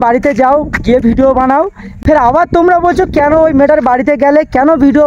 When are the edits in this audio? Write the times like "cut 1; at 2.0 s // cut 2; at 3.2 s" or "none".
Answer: cut 1; at 1.9 s